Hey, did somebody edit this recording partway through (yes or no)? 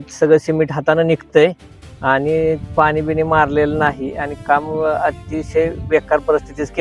no